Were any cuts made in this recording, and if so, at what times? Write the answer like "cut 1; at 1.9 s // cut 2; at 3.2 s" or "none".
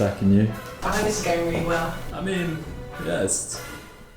cut 1; at 0.8 s // cut 2; at 1.9 s // cut 3; at 2.8 s

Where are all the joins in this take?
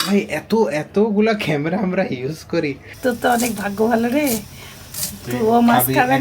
cut 1; at 2.9 s

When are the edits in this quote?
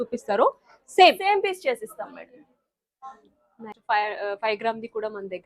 cut 1; at 3.7 s

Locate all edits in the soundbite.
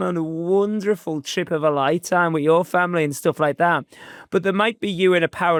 none

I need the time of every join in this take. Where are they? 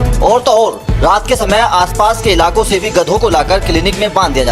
none

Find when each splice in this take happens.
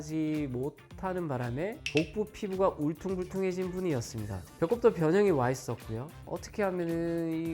cut 1; at 6.2 s

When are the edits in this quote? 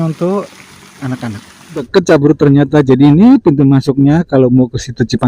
cut 1; at 1.9 s

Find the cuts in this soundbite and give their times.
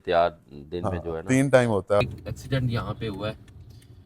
cut 1; at 2.0 s

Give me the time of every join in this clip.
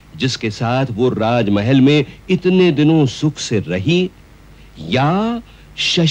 none

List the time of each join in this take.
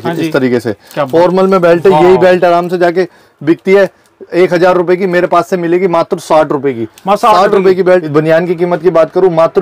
cut 1; at 1.1 s // cut 2; at 8.1 s

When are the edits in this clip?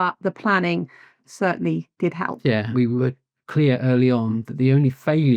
cut 1; at 1.2 s // cut 2; at 2.7 s

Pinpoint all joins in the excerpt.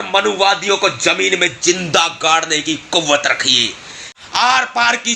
cut 1; at 4.1 s

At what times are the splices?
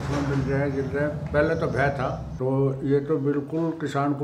cut 1; at 2.3 s

